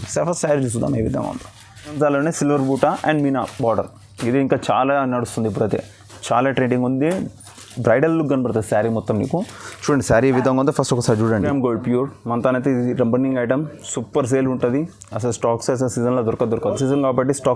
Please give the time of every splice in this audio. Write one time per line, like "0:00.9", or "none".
0:02.0
0:11.5
0:16.8